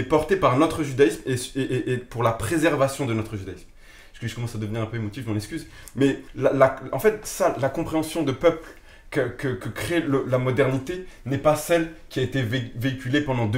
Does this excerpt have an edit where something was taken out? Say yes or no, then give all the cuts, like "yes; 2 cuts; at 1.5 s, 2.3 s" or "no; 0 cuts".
yes; 1 cut; at 6.3 s